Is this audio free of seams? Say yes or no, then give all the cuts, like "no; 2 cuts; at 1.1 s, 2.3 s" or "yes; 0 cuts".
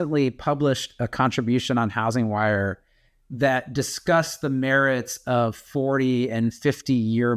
yes; 0 cuts